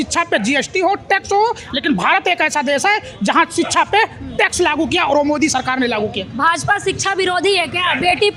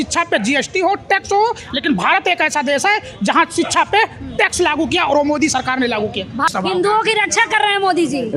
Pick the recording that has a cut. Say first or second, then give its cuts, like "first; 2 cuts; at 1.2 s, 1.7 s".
second; 1 cut; at 6.5 s